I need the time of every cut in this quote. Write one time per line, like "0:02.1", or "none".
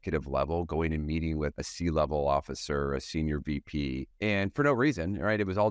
0:01.5
0:04.1